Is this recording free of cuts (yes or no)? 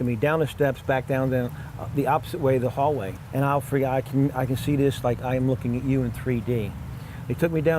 no